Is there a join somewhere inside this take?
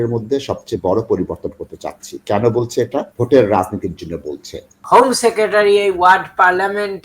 yes; 2 cuts; at 3.1 s, 4.7 s

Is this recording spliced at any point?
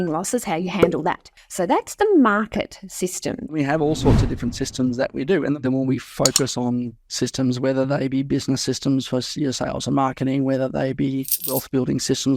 yes; 2 cuts; at 3.5 s, 5.6 s

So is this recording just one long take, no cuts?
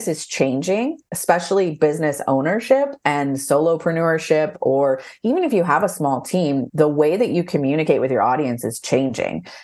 yes; 0 cuts

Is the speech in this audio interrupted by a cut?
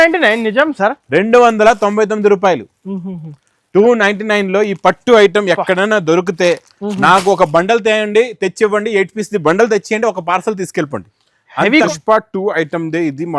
yes; 1 cut; at 11.9 s

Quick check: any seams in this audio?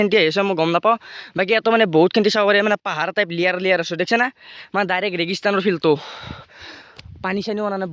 no; 0 cuts

